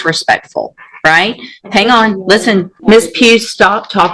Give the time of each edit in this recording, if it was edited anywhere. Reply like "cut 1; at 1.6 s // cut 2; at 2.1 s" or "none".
cut 1; at 2.7 s